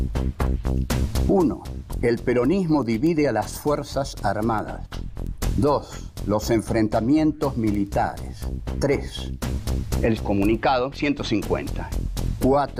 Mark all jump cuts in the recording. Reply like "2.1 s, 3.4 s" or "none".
11.8 s